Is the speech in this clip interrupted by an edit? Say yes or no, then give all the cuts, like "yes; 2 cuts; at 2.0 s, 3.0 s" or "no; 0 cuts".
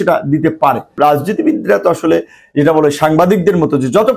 yes; 1 cut; at 1.0 s